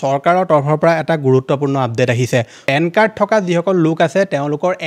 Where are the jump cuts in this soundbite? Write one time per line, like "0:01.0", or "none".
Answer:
0:02.6